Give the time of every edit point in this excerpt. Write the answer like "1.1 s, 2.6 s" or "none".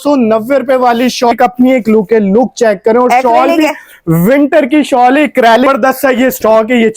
1.3 s, 5.7 s